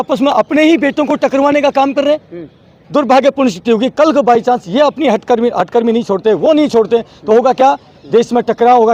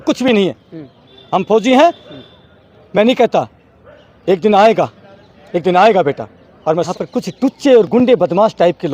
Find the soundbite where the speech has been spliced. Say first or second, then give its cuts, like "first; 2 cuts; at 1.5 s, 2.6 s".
second; 1 cut; at 6.9 s